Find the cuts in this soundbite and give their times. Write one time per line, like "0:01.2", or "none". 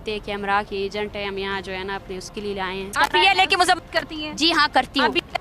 0:02.9